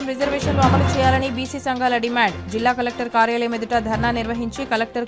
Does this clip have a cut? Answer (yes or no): no